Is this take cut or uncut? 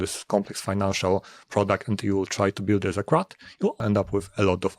cut